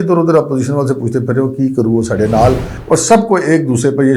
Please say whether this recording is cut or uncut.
cut